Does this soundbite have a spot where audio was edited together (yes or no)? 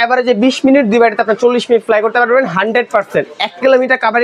no